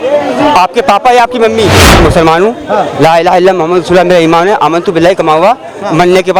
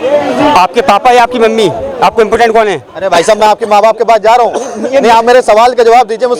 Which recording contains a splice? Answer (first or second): first